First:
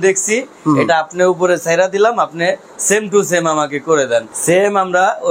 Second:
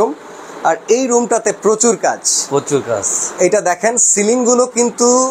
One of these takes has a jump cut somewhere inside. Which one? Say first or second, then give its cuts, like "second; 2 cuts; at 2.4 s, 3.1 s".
first; 1 cut; at 4.3 s